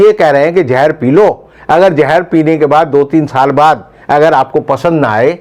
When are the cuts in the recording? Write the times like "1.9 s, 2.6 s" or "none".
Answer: none